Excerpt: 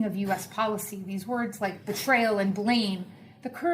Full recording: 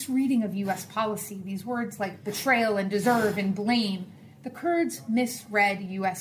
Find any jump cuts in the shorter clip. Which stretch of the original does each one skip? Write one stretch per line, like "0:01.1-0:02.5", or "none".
0:02.8-0:03.4